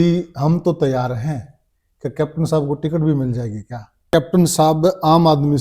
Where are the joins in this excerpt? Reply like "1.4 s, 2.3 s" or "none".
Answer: 4.1 s